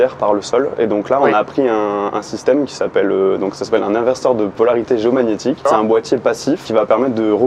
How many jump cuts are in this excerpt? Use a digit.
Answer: 3